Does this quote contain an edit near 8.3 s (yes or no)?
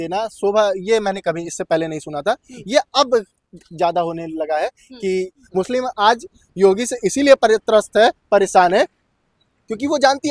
no